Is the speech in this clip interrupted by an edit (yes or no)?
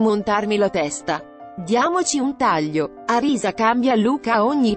no